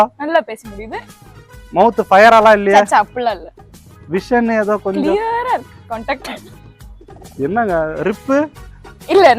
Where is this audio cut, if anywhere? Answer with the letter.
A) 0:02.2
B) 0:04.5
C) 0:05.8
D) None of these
D